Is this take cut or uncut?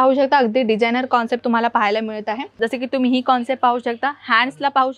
cut